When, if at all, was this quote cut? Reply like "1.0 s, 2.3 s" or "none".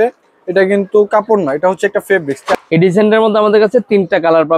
2.5 s